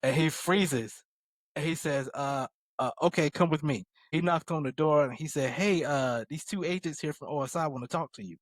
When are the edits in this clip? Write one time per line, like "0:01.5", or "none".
0:04.0